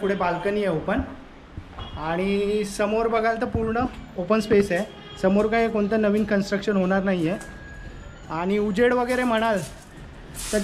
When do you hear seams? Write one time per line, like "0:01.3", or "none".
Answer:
none